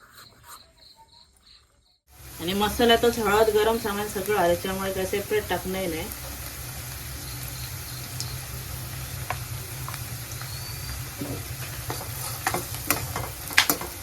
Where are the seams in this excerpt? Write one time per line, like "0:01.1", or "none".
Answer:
0:02.3